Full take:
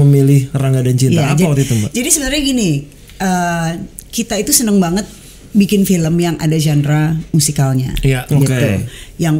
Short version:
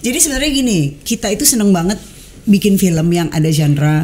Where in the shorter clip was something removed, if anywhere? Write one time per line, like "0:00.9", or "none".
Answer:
0:01.0

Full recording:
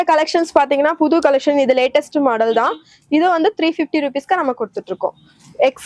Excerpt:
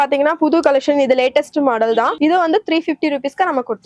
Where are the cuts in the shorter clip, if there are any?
0:02.1

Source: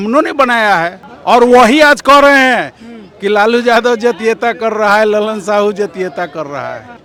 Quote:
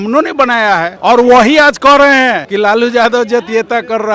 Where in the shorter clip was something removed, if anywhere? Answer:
0:00.9
0:02.4

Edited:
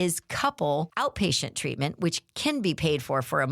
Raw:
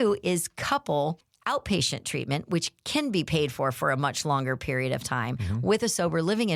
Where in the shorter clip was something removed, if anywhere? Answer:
0:00.9

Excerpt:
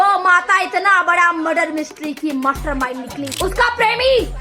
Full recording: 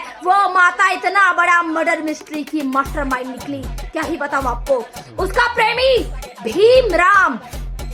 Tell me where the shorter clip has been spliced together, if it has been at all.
0:03.3

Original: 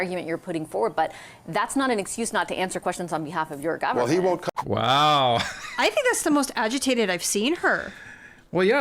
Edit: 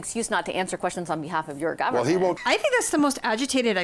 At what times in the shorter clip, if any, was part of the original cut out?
0:02.4

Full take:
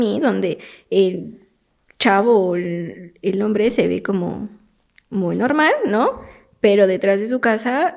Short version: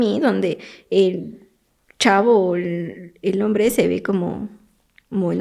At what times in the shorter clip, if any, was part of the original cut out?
none

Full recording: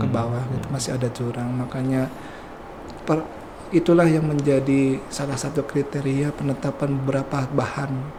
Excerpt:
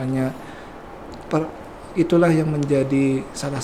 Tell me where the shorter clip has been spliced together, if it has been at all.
none

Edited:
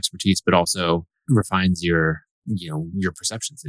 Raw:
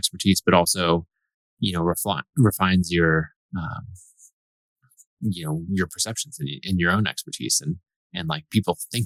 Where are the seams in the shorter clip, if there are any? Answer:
0:01.2
0:02.3

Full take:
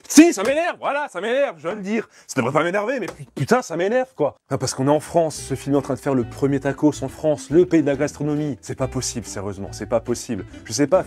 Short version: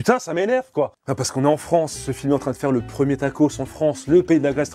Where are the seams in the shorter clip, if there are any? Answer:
none

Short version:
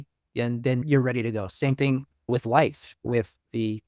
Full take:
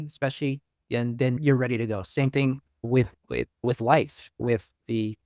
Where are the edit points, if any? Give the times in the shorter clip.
0:02.2

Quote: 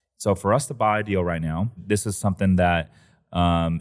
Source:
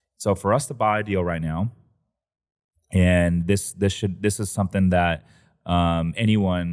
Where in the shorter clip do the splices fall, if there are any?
0:01.8

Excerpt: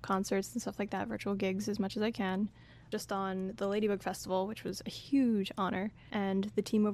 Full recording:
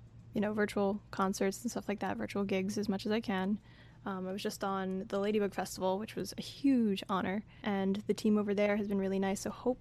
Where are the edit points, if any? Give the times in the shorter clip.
0:02.8

